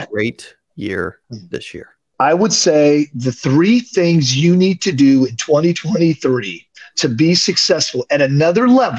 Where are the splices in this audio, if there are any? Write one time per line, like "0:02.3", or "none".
0:02.1

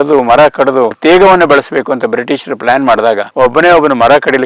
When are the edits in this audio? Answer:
0:01.0
0:03.3

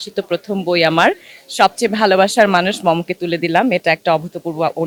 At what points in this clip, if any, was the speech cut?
none

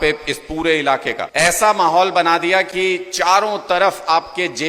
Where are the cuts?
0:01.2

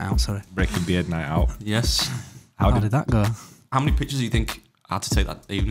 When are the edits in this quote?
0:03.7

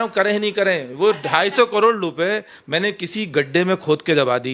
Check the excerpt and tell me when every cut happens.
none

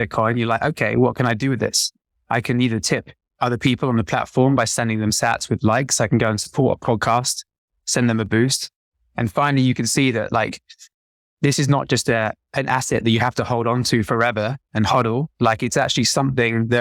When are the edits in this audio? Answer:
none

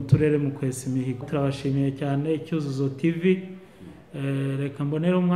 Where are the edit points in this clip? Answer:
0:01.2

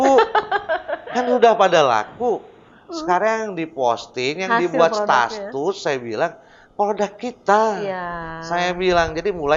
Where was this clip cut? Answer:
none

